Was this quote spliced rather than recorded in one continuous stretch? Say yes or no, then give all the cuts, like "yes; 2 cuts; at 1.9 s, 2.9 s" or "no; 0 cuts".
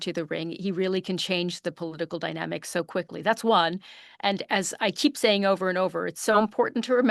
no; 0 cuts